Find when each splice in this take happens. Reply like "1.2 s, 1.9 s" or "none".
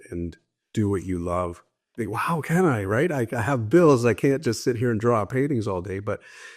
none